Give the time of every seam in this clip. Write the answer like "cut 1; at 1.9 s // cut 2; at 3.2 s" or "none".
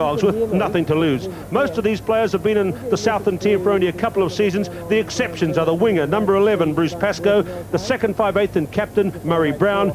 cut 1; at 4.3 s

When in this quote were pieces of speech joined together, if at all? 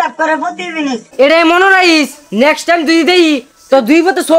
cut 1; at 1.0 s

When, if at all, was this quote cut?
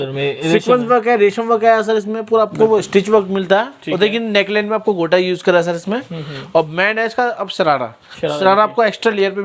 none

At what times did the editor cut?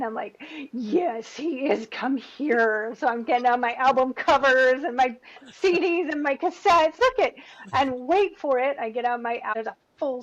cut 1; at 7.0 s // cut 2; at 9.5 s

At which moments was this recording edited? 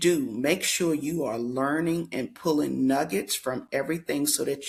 none

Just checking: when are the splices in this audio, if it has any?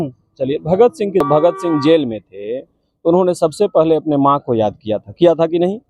cut 1; at 1.2 s

